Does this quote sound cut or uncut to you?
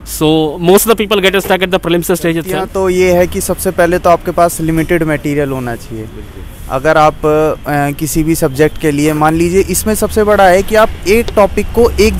cut